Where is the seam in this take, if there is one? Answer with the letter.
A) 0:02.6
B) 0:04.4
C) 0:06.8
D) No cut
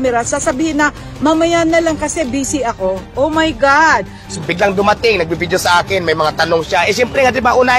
B